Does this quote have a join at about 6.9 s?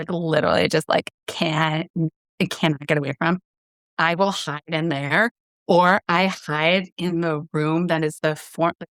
no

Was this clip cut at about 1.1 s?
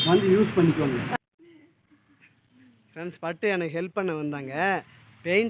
yes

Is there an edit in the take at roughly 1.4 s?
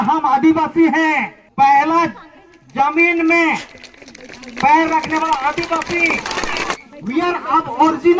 yes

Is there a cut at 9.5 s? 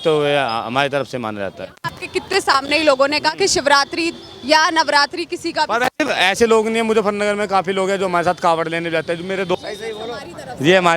yes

